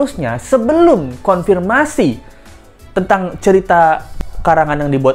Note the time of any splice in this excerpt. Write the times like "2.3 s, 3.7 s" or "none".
none

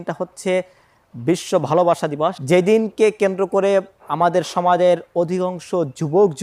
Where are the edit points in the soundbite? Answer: 2.4 s

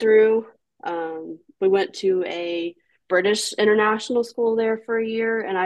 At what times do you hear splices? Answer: none

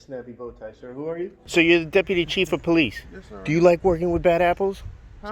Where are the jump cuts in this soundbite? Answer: 1.4 s

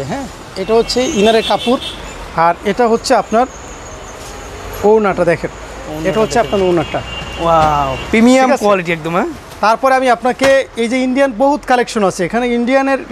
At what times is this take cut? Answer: none

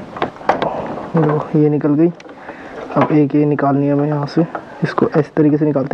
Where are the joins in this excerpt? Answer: none

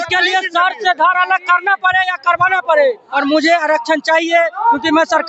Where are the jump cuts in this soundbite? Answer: 3.2 s

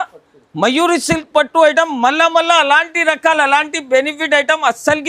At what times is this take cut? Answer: none

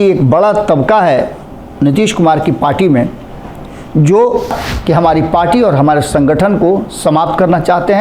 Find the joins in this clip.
4.6 s

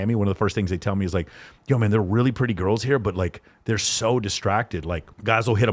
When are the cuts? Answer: none

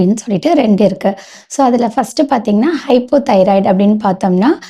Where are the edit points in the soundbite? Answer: none

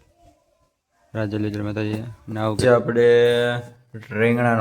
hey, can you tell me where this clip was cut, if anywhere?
2.6 s

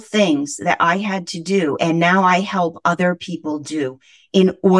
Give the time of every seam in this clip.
none

